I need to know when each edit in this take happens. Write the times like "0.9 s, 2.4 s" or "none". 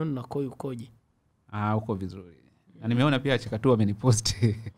none